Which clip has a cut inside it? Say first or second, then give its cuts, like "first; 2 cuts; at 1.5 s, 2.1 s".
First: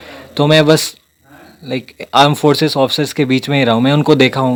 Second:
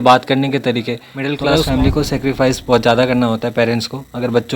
second; 1 cut; at 1.3 s